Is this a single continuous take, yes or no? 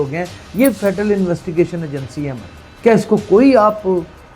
yes